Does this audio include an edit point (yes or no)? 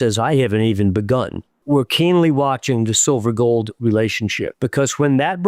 yes